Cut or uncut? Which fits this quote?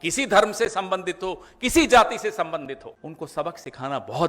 cut